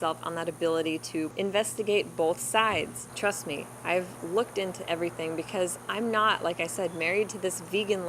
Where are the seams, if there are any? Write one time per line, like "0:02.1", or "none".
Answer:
0:01.3
0:03.0